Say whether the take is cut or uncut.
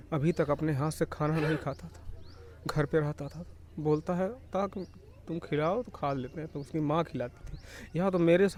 uncut